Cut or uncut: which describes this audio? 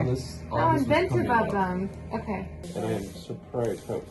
uncut